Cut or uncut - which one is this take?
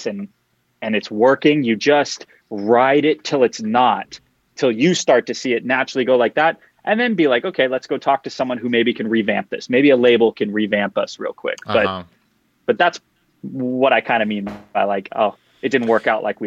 uncut